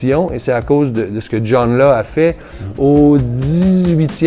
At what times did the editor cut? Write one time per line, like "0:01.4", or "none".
none